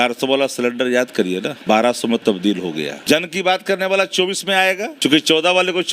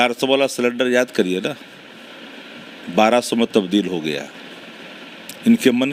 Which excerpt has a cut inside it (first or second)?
first